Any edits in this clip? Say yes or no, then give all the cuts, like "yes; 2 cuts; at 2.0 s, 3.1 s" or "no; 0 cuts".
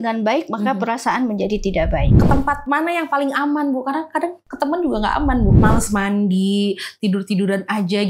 yes; 2 cuts; at 2.2 s, 5.6 s